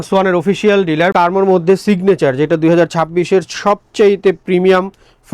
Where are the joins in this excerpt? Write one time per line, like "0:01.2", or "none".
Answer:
0:01.1